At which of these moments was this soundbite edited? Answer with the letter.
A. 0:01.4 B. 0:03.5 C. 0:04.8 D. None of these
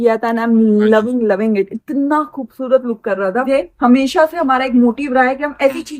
B